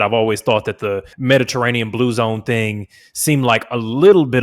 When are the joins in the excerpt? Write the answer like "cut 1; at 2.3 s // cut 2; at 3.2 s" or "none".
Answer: cut 1; at 1.1 s